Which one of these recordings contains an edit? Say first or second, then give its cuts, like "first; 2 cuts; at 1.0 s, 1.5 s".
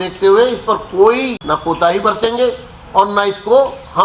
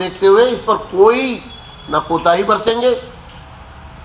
first; 2 cuts; at 1.4 s, 2.7 s